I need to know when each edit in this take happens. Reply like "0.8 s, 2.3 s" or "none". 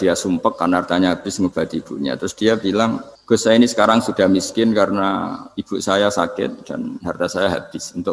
3.1 s